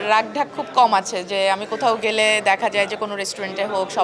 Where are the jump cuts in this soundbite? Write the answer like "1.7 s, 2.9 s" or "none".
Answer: none